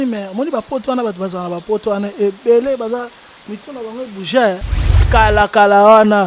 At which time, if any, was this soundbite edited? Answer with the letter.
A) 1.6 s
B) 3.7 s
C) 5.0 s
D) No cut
C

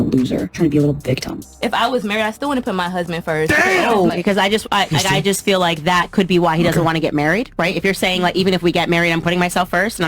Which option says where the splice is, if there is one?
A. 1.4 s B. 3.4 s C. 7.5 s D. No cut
A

